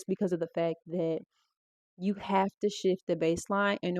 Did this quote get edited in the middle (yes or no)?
no